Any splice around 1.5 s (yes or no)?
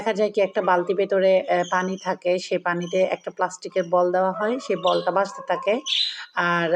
no